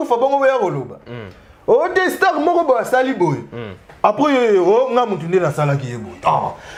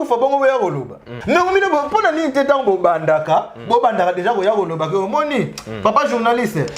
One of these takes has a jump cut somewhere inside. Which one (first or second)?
second